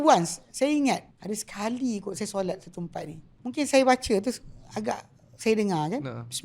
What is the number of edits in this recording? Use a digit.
2